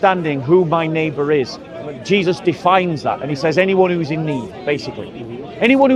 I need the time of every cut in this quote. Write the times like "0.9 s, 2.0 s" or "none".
none